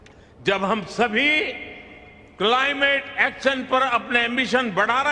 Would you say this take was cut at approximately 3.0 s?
no; 0 cuts

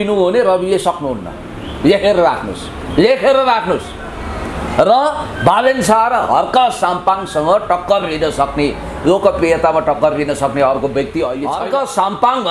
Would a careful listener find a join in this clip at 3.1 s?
no; 1 cut; at 11.4 s

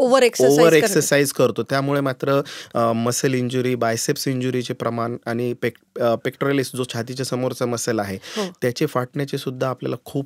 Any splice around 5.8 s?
no; 0 cuts

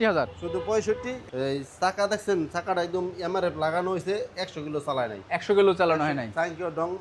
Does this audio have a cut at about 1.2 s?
yes; 1 cut; at 1.2 s

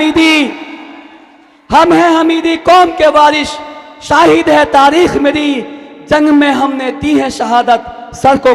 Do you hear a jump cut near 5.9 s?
no; 0 cuts

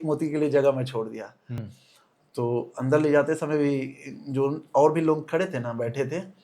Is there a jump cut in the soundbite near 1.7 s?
yes; 1 cut; at 1.7 s

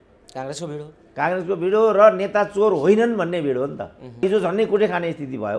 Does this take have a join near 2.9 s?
no; 1 cut; at 4.2 s

